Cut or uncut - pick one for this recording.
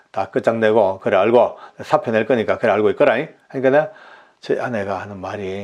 uncut